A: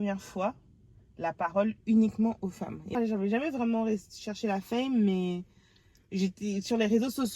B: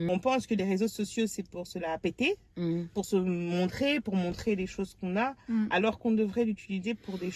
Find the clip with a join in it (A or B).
A